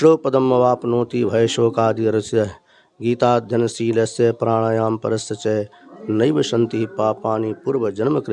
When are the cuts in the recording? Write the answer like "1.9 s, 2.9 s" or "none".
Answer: none